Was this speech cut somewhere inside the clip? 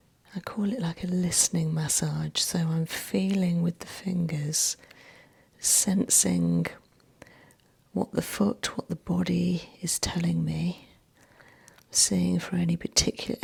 no; 0 cuts

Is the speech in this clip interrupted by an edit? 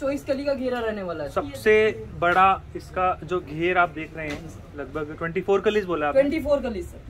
no; 0 cuts

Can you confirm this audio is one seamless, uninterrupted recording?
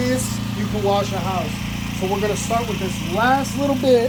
yes; 0 cuts

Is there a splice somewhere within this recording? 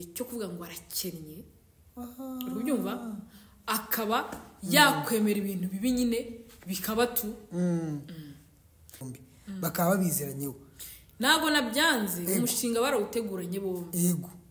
yes; 1 cut; at 9.0 s

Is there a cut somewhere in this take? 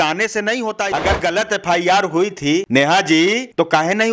yes; 2 cuts; at 0.8 s, 2.7 s

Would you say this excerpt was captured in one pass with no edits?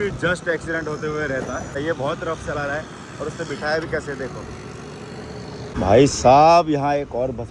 no; 2 cuts; at 1.7 s, 5.6 s

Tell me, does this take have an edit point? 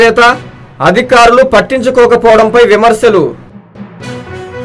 yes; 1 cut; at 3.5 s

